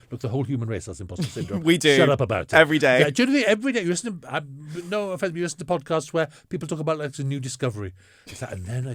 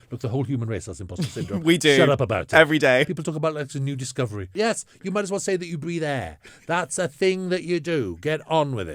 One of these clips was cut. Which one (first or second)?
second